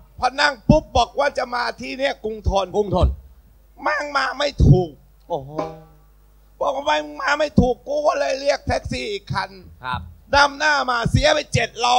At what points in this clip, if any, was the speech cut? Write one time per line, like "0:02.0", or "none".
none